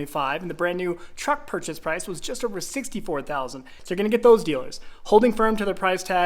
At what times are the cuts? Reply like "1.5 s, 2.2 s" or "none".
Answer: 3.8 s